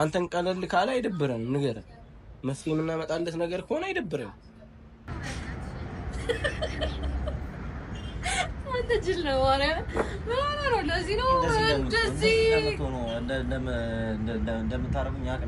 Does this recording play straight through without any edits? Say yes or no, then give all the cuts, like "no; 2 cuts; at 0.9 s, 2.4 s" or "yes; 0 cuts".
no; 1 cut; at 5.1 s